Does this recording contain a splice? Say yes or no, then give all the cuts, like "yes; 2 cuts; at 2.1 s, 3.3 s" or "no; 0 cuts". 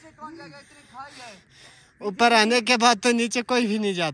no; 0 cuts